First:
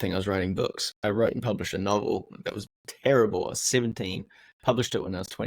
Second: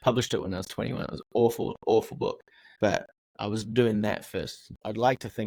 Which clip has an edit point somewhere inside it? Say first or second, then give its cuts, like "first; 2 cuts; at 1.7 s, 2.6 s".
first; 1 cut; at 1.0 s